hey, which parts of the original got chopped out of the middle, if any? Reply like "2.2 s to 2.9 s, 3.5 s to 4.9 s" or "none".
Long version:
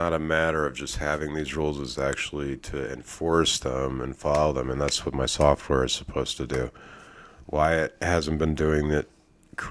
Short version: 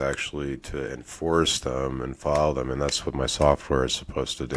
none